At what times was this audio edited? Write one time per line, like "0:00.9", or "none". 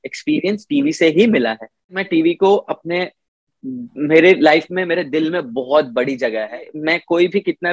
0:02.0
0:06.7